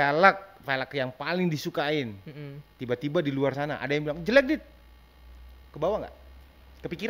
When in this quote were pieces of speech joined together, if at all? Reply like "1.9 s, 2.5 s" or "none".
none